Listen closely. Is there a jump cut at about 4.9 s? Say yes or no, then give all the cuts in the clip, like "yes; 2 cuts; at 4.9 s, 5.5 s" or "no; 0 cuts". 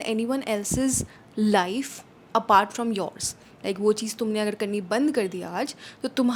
no; 0 cuts